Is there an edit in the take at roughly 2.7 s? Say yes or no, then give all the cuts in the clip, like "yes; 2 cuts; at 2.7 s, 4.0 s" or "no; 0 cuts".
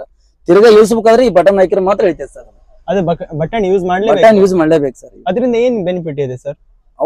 no; 0 cuts